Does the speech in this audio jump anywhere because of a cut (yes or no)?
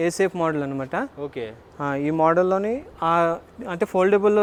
no